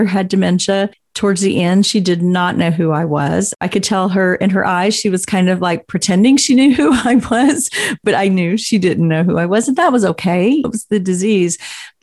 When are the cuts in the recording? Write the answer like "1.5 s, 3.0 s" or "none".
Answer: 1.0 s, 3.6 s, 8.0 s, 10.7 s